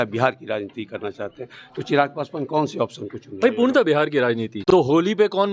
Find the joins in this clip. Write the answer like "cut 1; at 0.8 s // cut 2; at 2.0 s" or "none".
cut 1; at 4.5 s